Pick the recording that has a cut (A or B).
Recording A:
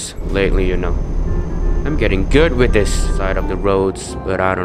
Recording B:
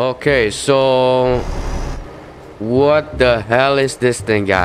A